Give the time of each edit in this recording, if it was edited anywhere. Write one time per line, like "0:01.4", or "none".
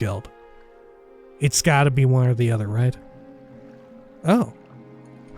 0:04.1